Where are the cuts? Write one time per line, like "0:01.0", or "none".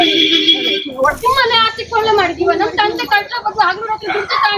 0:01.2